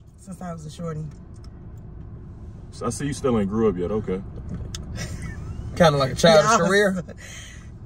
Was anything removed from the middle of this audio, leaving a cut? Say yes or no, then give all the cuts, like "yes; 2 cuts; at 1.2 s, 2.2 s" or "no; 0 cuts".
no; 0 cuts